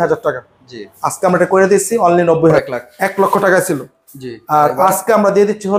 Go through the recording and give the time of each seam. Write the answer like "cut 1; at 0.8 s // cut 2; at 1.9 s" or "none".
cut 1; at 2.6 s